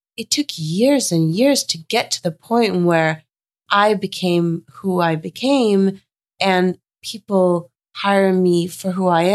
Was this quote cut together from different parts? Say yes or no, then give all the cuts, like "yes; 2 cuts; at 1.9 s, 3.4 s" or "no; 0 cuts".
no; 0 cuts